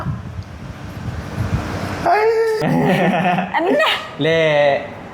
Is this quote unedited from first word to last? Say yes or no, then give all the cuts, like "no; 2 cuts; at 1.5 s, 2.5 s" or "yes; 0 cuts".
no; 1 cut; at 2.6 s